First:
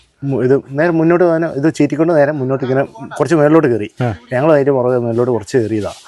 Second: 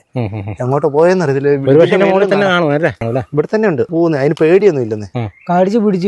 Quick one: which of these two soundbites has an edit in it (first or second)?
second